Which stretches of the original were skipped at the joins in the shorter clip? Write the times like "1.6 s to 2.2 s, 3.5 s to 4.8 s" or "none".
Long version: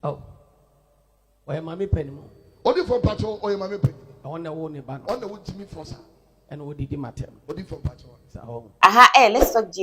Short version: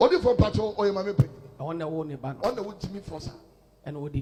none